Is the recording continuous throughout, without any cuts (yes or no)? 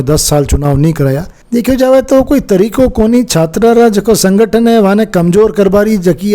no